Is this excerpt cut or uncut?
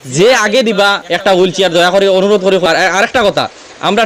cut